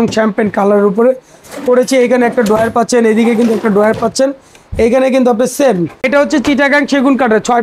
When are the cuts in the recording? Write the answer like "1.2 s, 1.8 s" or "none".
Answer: 6.0 s